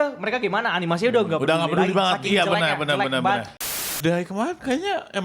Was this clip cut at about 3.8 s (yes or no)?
yes